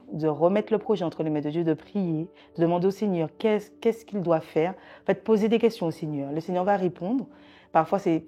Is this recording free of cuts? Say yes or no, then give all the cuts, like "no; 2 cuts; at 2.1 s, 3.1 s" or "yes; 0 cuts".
yes; 0 cuts